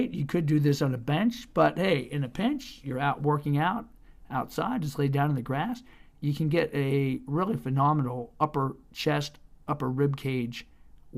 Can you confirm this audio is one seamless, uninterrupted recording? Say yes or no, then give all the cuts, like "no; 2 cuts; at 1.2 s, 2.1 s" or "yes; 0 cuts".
yes; 0 cuts